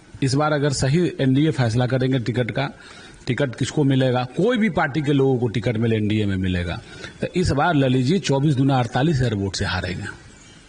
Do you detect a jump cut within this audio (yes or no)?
no